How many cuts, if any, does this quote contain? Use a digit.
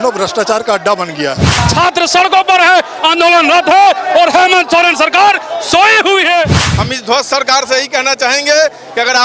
2